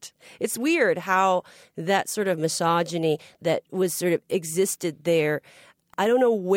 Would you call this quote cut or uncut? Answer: cut